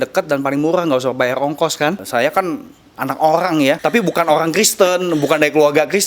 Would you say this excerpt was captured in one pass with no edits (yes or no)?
no